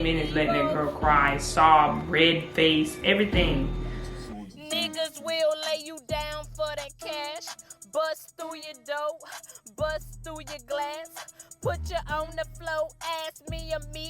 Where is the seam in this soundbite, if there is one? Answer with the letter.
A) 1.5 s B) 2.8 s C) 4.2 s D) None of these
C